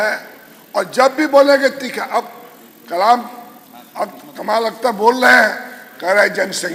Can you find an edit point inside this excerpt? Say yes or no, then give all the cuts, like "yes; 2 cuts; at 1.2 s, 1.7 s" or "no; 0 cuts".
no; 0 cuts